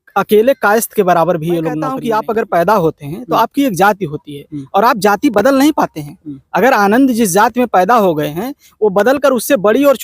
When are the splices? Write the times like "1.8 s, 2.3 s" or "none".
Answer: 1.9 s